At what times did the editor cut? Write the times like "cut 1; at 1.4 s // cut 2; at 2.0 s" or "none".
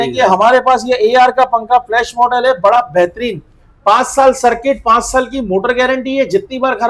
none